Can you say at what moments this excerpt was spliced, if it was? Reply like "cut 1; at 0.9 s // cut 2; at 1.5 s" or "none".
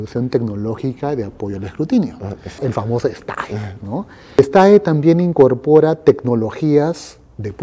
cut 1; at 2.7 s // cut 2; at 4.4 s